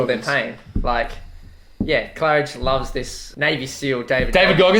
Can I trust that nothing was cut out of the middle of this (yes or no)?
yes